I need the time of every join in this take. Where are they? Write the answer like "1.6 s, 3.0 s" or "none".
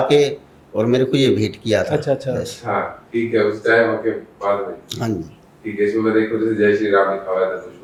none